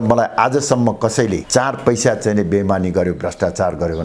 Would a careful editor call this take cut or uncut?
uncut